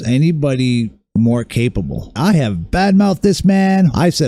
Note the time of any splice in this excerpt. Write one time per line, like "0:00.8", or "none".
none